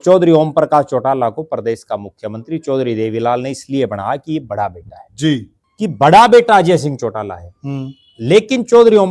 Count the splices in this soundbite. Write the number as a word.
one